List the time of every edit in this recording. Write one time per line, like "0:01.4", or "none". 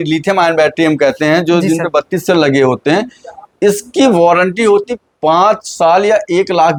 none